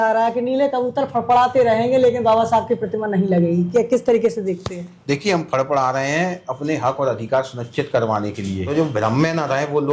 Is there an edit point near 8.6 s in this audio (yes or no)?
yes